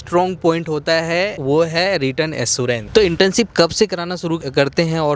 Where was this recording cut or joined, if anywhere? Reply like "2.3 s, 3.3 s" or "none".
1.4 s, 2.8 s